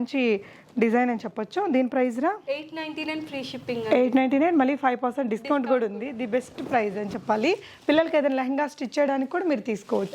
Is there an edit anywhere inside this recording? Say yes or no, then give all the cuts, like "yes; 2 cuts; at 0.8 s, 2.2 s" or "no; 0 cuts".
no; 0 cuts